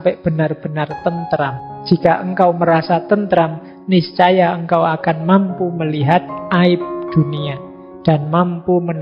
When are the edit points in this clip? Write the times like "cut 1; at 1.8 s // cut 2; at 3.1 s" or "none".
cut 1; at 1.7 s